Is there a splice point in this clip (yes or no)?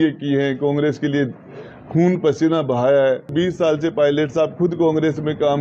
yes